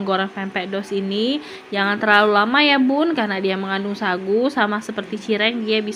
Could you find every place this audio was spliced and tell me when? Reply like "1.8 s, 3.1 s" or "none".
none